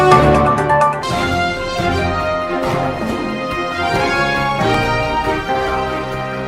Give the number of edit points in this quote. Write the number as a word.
one